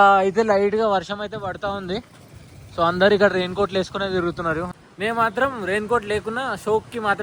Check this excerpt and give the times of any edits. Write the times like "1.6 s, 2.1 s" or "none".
none